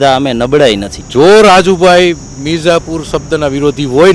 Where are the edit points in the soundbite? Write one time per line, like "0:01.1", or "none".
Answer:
0:00.9